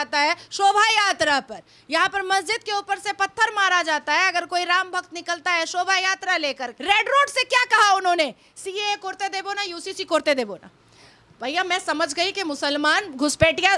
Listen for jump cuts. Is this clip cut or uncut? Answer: cut